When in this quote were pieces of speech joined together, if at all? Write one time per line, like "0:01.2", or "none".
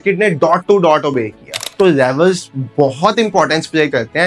0:01.6